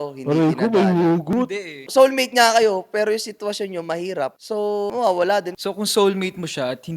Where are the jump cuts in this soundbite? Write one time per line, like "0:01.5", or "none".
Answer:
0:01.9
0:05.5